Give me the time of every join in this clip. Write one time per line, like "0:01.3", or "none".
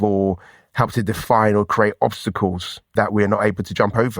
0:02.9